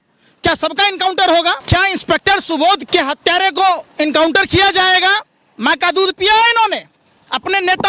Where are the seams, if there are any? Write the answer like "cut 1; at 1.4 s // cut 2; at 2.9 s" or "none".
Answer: cut 1; at 1.6 s // cut 2; at 2.8 s